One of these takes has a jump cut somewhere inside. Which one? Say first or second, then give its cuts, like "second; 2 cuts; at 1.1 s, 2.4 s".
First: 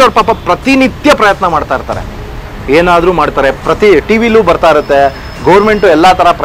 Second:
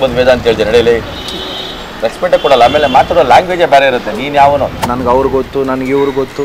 second; 1 cut; at 4.9 s